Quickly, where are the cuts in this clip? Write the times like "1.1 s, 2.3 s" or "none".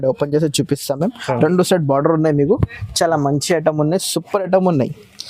none